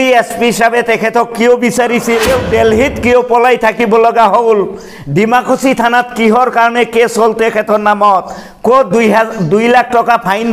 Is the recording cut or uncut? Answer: cut